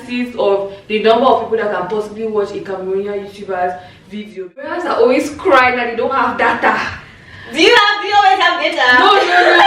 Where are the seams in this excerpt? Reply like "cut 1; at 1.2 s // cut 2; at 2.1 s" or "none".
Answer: cut 1; at 4.7 s

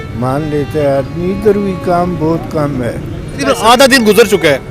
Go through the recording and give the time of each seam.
cut 1; at 3.4 s

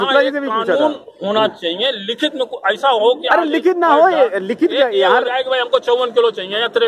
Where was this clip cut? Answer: none

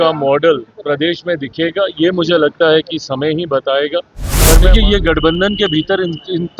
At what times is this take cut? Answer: cut 1; at 4.6 s

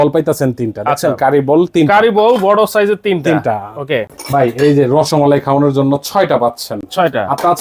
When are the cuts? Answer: none

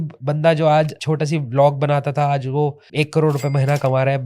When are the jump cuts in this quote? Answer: cut 1; at 1.0 s // cut 2; at 2.8 s

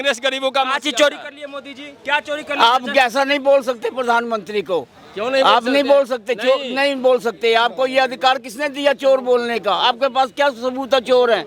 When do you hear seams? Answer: none

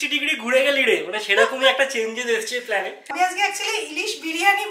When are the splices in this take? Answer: cut 1; at 3.1 s

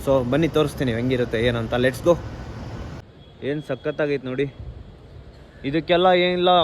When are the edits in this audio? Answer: cut 1; at 2.8 s

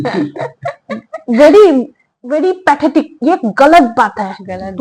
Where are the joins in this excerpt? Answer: none

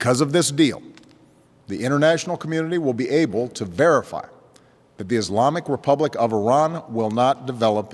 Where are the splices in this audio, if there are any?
none

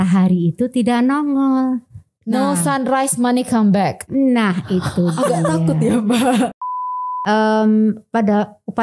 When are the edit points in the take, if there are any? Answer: cut 1; at 6.6 s

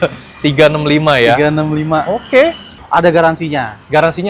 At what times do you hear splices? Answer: cut 1; at 2.8 s

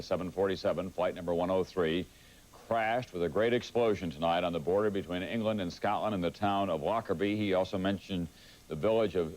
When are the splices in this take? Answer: cut 1; at 2.5 s

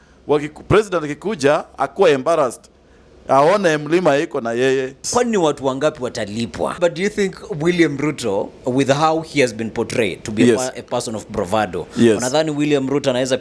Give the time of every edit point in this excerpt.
cut 1; at 5.1 s // cut 2; at 6.7 s

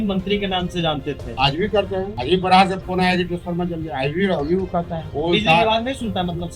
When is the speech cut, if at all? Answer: cut 1; at 1.3 s // cut 2; at 2.1 s // cut 3; at 5.0 s

